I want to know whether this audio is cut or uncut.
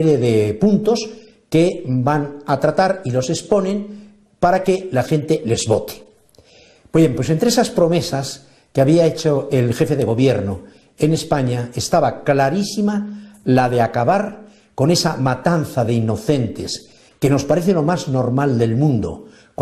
cut